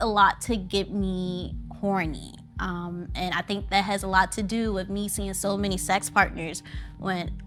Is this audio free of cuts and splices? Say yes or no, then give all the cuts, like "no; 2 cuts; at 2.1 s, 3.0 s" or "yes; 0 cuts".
yes; 0 cuts